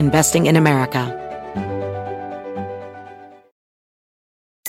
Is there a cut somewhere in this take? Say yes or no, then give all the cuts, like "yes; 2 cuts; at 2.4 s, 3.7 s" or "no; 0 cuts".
yes; 1 cut; at 1.1 s